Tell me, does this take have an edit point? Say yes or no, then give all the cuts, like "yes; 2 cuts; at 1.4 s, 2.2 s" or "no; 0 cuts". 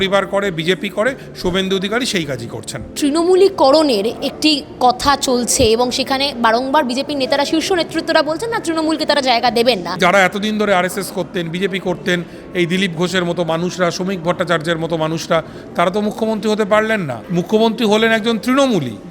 yes; 3 cuts; at 2.9 s, 10.0 s, 17.2 s